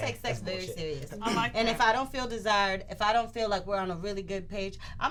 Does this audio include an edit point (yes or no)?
no